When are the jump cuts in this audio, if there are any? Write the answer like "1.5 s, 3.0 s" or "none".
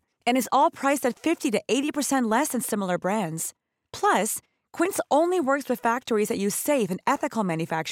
none